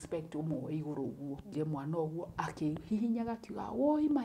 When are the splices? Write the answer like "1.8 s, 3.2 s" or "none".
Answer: 1.5 s